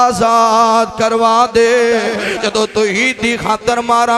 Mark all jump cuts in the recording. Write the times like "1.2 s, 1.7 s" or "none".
2.2 s

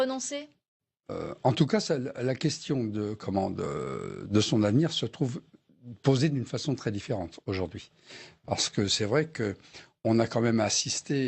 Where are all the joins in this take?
3.7 s

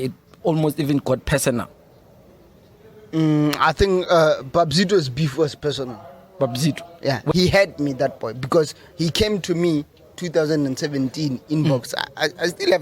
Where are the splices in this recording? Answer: 7.3 s

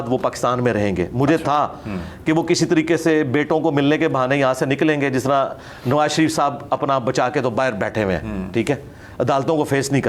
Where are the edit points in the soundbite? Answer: none

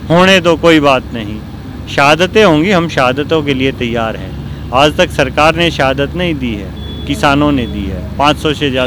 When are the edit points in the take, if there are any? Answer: none

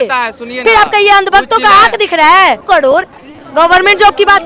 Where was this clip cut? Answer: 2.6 s

